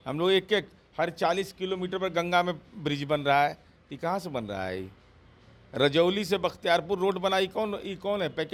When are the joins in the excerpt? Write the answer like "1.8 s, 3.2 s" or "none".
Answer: none